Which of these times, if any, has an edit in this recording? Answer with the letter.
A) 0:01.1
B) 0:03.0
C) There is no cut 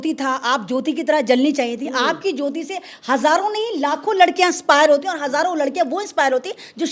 C